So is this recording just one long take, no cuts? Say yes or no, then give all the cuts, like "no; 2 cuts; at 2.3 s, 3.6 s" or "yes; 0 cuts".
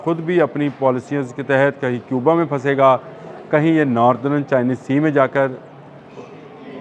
yes; 0 cuts